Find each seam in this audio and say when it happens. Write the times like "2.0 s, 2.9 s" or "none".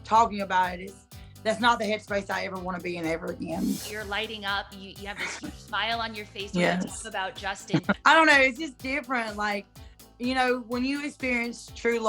3.9 s, 8.0 s